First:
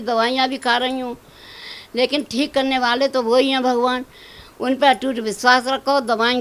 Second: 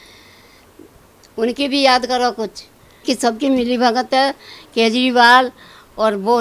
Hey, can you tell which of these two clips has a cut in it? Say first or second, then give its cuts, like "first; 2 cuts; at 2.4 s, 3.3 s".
second; 1 cut; at 3.0 s